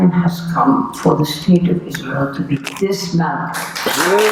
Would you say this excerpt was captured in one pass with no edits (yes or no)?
yes